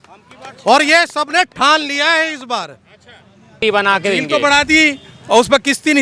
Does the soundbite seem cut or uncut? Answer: cut